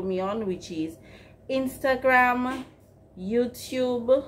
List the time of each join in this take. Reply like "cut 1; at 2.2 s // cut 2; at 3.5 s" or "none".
none